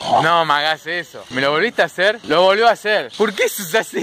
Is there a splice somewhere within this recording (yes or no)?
yes